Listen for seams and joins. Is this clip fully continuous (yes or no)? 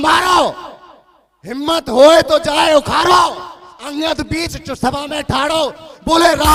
yes